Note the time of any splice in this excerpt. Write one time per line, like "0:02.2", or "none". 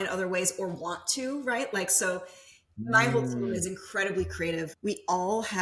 0:04.7